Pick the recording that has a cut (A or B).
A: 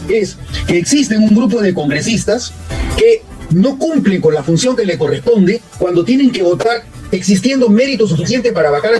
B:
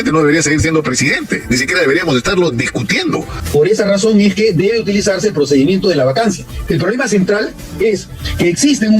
B